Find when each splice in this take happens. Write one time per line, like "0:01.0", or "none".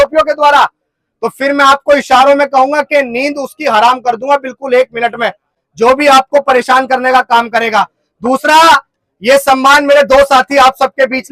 none